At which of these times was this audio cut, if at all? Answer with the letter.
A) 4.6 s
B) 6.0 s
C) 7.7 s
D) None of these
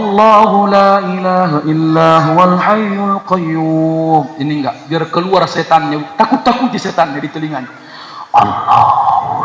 D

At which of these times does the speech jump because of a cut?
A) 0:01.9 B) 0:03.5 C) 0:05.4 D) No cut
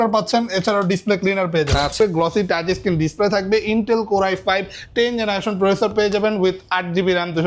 A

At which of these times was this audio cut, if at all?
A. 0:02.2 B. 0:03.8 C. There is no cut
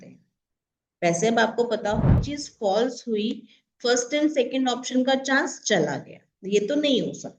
A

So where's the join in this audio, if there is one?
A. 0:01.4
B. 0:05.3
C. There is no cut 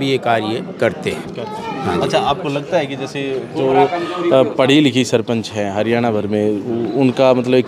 C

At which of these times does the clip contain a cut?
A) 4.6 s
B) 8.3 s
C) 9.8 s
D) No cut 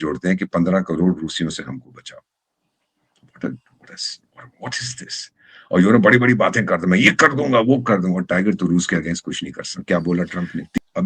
C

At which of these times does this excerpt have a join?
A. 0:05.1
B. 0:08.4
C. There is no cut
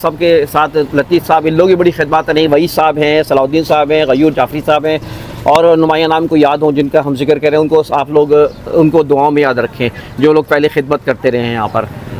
C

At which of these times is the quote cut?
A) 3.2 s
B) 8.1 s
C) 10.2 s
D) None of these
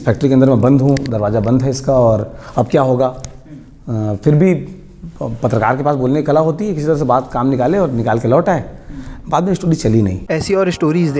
C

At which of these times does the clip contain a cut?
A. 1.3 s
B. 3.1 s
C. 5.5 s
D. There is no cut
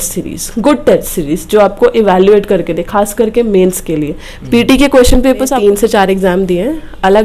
C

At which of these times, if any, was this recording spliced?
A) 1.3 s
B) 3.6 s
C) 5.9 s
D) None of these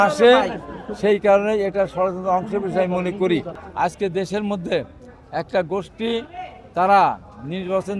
B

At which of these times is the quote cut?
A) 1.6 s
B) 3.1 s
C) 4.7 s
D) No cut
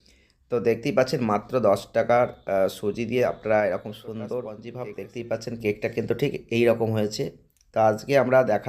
C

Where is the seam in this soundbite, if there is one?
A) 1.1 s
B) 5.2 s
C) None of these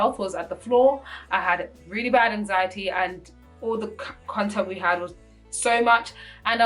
C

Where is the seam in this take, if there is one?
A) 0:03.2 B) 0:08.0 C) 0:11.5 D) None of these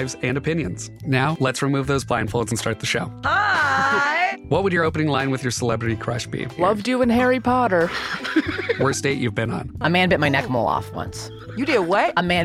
D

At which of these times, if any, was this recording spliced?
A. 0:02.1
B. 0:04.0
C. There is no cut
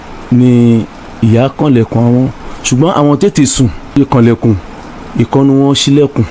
B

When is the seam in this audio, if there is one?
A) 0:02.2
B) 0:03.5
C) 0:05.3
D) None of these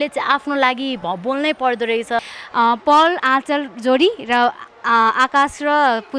A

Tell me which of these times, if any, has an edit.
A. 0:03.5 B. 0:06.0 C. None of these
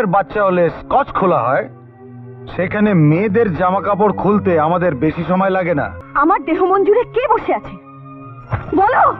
B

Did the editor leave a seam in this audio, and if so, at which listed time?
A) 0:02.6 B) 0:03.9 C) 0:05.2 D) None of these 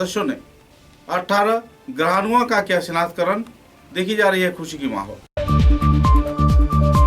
C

